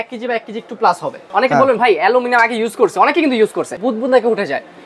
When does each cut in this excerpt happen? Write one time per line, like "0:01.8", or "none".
0:01.3
0:03.7